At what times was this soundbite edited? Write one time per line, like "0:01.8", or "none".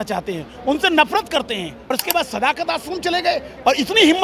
0:02.0